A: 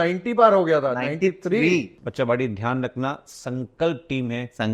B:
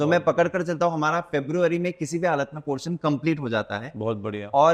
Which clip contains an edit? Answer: A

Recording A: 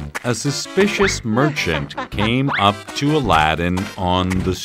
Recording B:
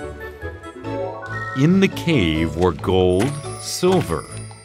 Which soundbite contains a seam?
B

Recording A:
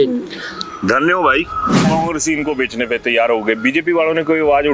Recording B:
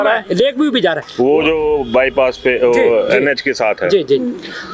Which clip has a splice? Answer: A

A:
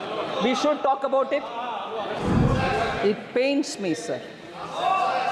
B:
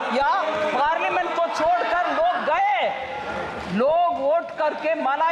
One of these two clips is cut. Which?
A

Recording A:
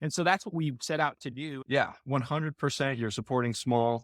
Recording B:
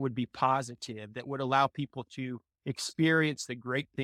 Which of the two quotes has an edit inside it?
A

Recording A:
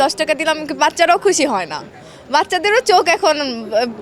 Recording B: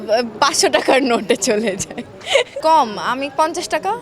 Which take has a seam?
B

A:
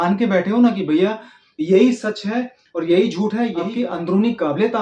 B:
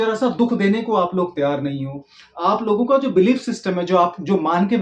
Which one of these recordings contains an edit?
A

